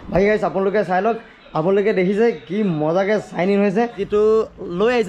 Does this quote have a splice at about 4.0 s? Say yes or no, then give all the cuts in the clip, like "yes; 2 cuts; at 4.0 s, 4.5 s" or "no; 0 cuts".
yes; 1 cut; at 4.0 s